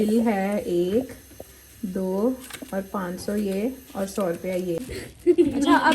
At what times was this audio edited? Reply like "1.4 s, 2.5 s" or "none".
5.0 s